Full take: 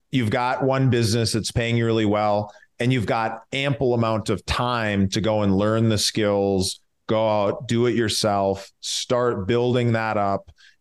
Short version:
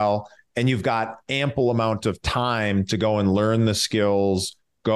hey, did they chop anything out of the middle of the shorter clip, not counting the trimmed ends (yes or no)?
no